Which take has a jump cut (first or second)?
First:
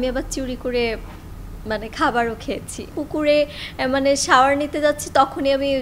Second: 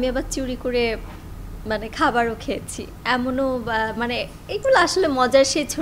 first